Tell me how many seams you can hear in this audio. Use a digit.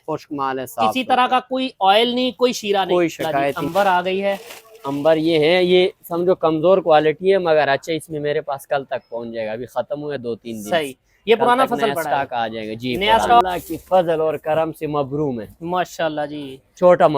2